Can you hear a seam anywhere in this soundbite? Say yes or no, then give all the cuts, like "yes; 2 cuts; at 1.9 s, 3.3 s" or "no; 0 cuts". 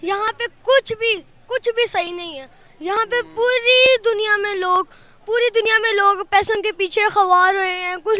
no; 0 cuts